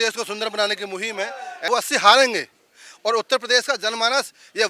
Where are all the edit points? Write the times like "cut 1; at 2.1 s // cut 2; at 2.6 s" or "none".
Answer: cut 1; at 1.7 s